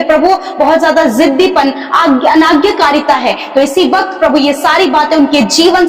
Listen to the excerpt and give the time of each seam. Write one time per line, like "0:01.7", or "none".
none